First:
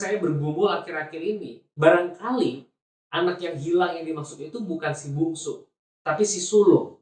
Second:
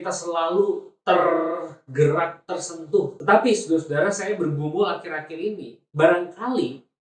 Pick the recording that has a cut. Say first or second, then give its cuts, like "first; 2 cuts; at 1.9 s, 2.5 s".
second; 1 cut; at 3.2 s